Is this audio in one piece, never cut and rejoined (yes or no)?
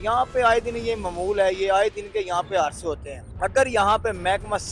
yes